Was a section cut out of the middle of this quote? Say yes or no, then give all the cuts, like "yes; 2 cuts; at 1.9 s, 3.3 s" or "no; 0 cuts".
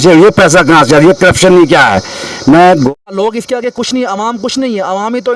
yes; 1 cut; at 2.9 s